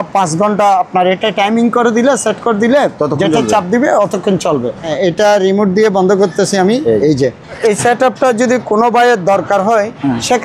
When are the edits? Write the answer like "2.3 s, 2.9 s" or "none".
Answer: 4.9 s, 7.6 s

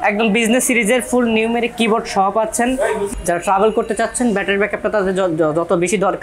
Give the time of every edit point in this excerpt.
3.1 s

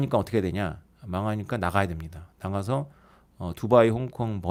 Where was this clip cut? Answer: none

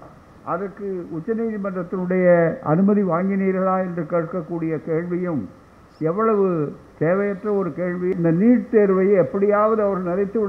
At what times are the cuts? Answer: 8.1 s

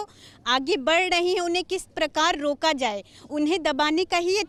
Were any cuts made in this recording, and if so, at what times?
none

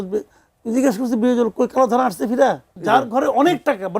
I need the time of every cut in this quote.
2.7 s

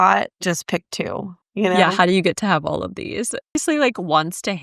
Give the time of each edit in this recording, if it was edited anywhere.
3.6 s

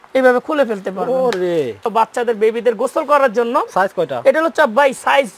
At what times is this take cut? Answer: 1.8 s

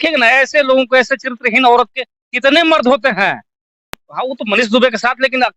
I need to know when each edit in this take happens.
4.1 s

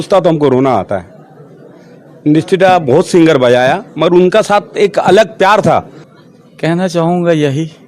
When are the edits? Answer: 6.0 s

